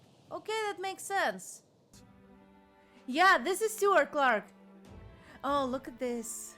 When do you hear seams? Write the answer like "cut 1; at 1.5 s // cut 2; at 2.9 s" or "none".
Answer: cut 1; at 1.9 s